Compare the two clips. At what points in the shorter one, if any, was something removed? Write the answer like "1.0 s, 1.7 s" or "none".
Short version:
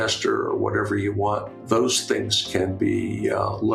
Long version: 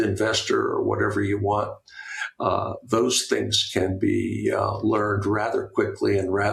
1.6 s

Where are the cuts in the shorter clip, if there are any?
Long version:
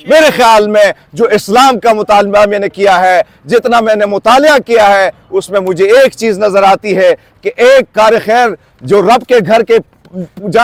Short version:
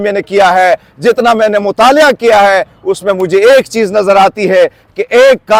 none

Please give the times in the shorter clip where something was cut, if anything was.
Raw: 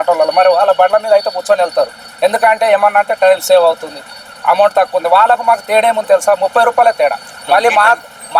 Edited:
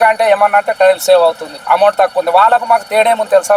1.5 s

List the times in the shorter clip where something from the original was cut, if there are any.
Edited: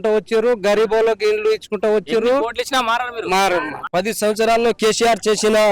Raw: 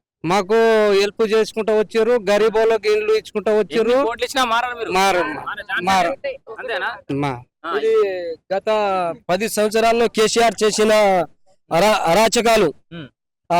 3.8 s

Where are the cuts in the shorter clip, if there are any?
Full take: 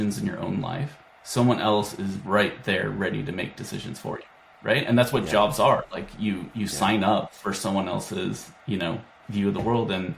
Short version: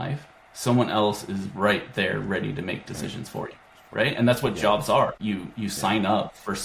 5.2 s

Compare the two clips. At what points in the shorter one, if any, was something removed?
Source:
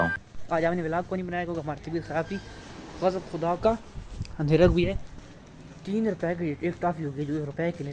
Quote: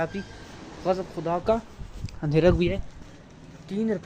none

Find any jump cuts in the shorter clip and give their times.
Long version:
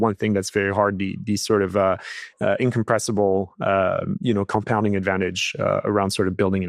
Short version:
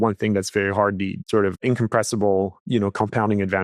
1.2 s, 2.6 s

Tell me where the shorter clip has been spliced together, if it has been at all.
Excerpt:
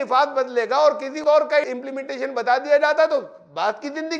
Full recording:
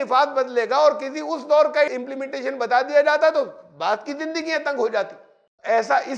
1.1 s

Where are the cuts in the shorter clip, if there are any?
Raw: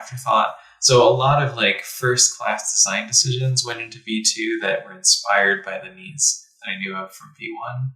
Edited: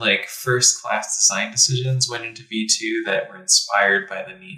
none

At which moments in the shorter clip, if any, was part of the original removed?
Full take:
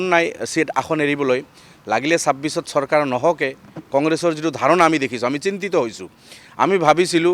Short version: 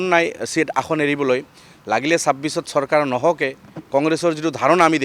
none

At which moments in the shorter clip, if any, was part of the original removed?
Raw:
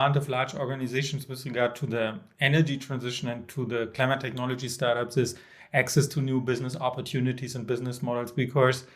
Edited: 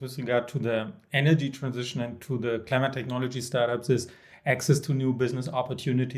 none

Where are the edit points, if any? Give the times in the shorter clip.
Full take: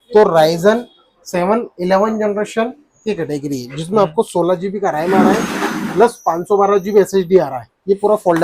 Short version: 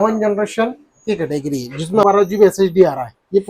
2.0 s

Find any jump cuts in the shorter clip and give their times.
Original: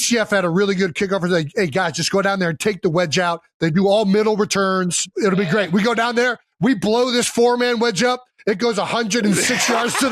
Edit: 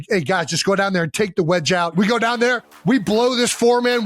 1.9 s

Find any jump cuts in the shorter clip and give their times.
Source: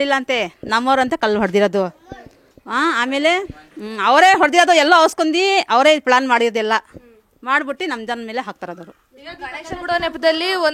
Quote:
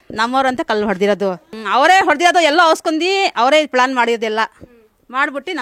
1.5 s

